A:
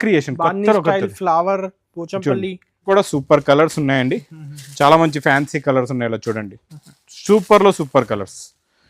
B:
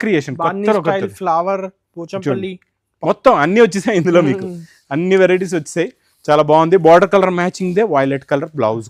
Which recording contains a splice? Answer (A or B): A